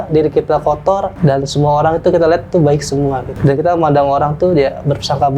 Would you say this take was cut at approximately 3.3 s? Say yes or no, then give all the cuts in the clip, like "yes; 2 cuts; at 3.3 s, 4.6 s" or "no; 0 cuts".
yes; 2 cuts; at 1.1 s, 3.3 s